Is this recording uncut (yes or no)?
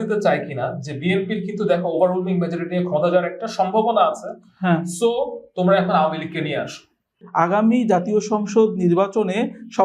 no